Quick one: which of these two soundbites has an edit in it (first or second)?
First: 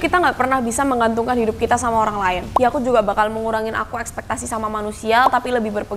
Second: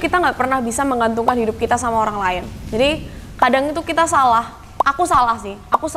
first